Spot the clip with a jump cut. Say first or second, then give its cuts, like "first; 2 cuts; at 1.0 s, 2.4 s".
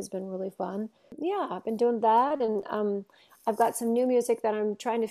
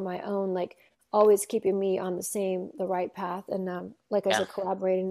first; 1 cut; at 1.1 s